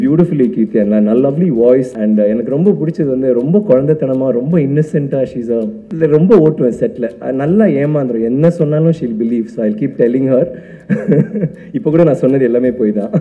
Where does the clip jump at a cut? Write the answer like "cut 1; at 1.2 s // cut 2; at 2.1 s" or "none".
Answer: cut 1; at 1.9 s // cut 2; at 5.8 s

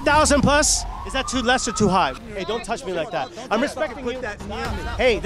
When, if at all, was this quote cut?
cut 1; at 2.1 s

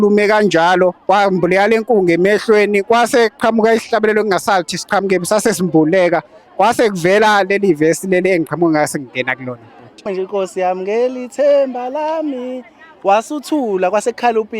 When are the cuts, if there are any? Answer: cut 1; at 1.0 s // cut 2; at 10.0 s

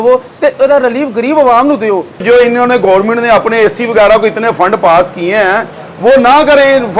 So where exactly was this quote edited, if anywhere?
cut 1; at 2.2 s

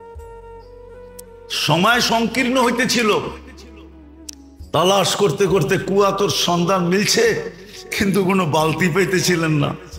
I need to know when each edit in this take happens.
cut 1; at 1.2 s

